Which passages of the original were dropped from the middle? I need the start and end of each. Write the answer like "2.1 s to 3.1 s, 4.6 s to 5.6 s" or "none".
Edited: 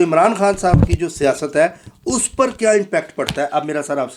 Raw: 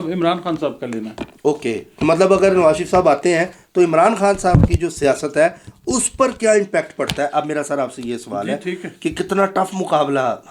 none